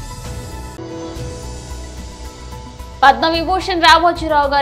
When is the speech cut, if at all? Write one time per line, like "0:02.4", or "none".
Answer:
0:00.8
0:03.0